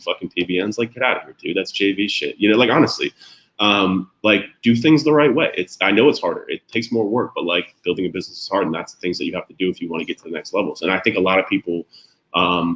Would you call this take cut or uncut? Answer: uncut